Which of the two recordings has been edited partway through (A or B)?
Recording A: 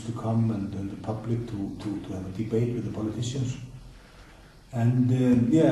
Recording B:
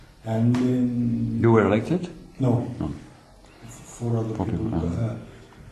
B